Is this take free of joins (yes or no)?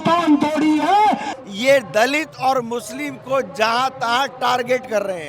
no